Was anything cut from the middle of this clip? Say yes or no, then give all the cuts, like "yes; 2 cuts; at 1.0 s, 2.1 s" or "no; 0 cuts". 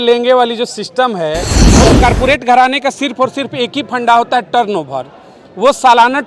yes; 1 cut; at 1.6 s